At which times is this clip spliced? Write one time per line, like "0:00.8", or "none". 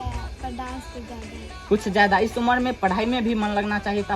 none